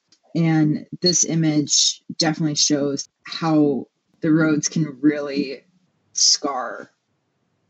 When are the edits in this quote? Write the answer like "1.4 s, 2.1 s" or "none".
3.0 s